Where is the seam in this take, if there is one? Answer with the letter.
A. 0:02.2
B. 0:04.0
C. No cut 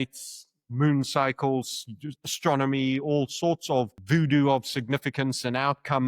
B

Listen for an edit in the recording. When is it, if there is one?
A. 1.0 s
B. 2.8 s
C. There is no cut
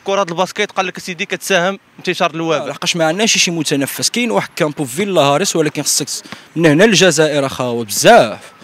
B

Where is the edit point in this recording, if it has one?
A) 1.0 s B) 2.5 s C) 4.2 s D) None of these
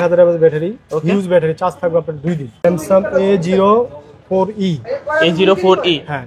B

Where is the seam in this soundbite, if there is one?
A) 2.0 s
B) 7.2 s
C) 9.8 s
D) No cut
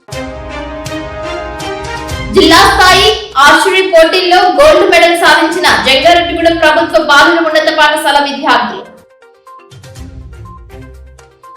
A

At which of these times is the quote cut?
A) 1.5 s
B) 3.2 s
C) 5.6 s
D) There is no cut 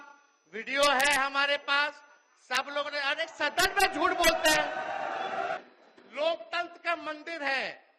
C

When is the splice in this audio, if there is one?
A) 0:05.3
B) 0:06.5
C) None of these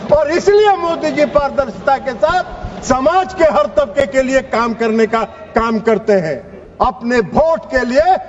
B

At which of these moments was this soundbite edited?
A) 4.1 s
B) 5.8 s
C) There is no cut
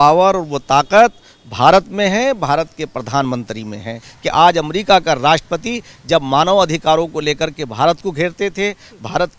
A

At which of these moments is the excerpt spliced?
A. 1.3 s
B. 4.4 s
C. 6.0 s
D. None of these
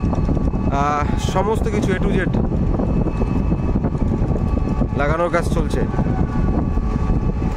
D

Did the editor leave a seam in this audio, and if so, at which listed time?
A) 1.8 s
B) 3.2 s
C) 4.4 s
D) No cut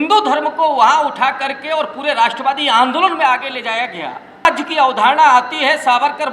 C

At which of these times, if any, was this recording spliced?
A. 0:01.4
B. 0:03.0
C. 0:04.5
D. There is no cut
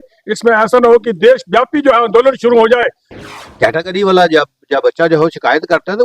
B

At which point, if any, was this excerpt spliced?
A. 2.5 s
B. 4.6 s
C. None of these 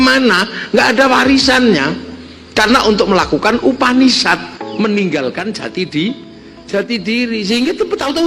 B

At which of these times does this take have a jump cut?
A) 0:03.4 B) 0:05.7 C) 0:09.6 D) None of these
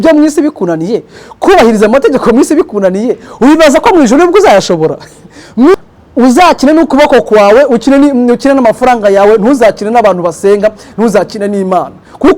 B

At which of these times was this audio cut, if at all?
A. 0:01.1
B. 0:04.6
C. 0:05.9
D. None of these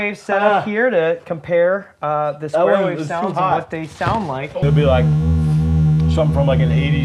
B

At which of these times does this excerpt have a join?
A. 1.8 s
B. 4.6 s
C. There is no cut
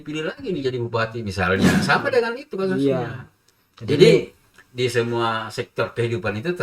A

